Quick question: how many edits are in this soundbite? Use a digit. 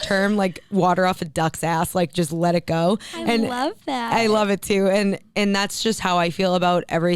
0